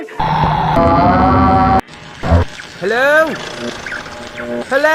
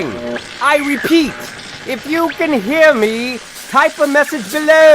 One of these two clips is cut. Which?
second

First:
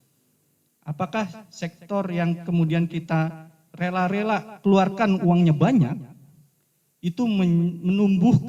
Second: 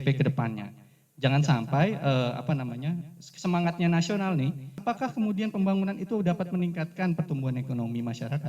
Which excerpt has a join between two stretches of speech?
second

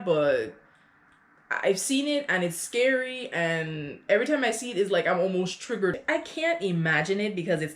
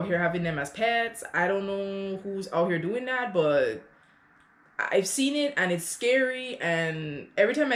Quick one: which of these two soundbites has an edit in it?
first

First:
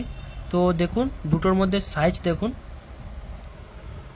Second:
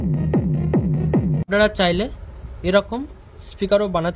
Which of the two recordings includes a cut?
second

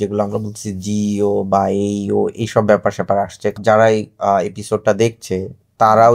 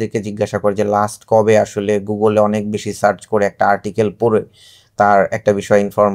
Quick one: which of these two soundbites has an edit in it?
first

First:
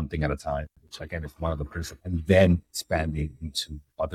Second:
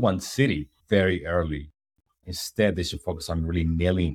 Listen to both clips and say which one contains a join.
first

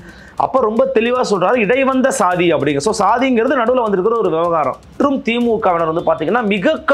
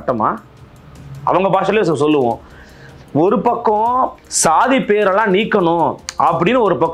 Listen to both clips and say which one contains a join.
first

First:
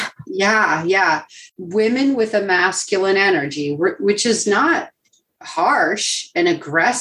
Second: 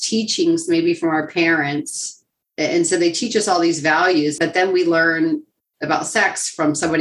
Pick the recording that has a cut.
second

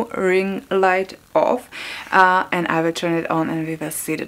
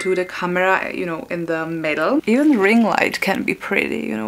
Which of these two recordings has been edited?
second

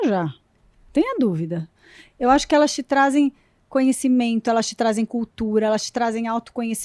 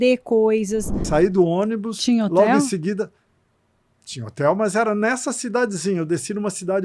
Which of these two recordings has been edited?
second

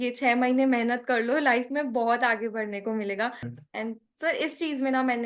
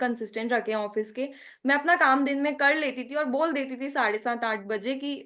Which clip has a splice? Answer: first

